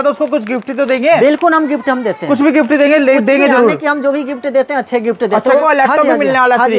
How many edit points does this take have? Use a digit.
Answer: 1